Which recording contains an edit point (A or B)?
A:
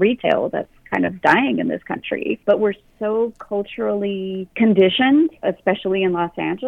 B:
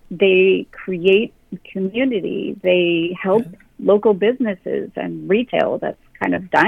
A